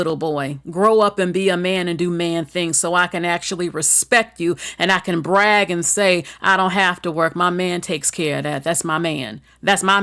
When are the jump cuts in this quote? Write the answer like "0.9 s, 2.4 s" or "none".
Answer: none

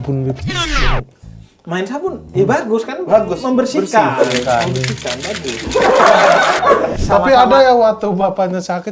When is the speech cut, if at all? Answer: 6.9 s

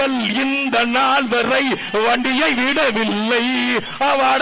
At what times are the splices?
none

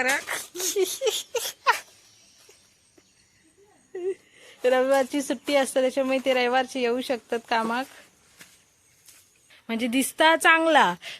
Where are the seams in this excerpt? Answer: 9.5 s

